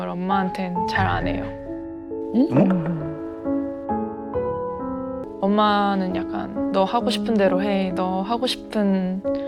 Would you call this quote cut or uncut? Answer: cut